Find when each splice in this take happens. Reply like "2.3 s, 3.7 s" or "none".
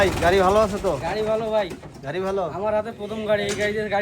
none